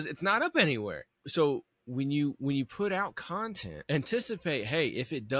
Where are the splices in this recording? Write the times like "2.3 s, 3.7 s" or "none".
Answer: 1.2 s, 3.7 s

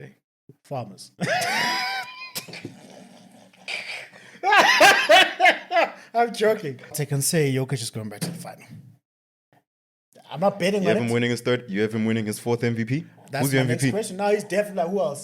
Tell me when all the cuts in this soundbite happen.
7.0 s

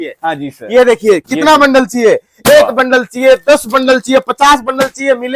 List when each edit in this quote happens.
none

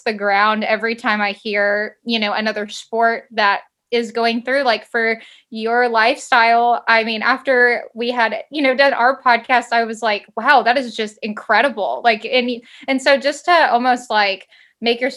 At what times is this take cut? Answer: none

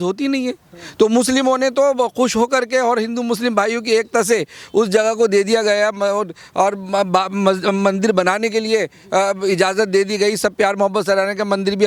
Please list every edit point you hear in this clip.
none

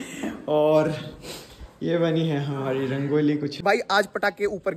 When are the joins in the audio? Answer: 3.6 s

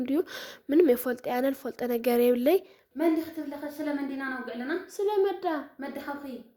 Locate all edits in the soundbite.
2.8 s

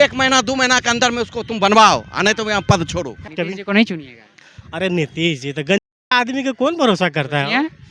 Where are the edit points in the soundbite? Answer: 3.2 s

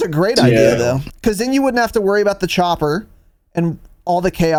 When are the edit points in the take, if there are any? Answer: none

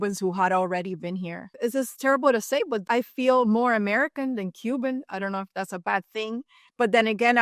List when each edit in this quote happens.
1.4 s, 2.8 s

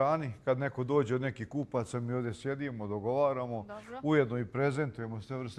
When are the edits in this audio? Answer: none

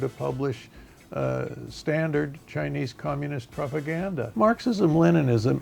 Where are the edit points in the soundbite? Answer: 4.2 s

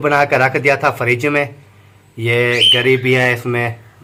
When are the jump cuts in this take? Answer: none

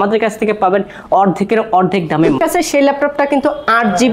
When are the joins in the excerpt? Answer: 2.4 s

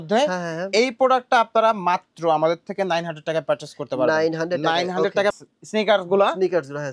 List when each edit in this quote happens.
5.3 s

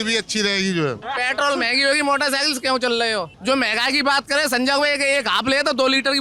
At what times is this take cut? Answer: 1.1 s, 3.3 s

